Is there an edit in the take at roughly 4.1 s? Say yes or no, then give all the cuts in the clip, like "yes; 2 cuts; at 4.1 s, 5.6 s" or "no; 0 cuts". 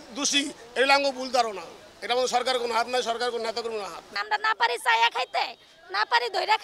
yes; 1 cut; at 4.1 s